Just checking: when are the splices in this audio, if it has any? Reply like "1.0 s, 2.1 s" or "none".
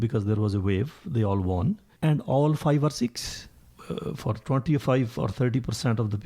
1.9 s, 3.7 s